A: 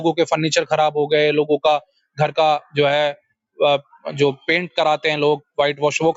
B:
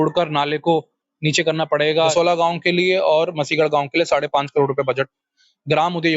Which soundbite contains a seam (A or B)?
B